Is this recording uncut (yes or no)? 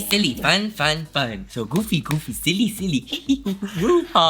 yes